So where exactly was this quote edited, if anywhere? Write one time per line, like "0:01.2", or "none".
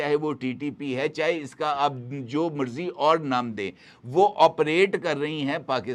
none